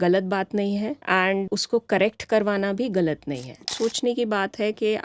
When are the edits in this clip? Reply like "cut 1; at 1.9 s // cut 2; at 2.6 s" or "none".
cut 1; at 1.4 s // cut 2; at 3.7 s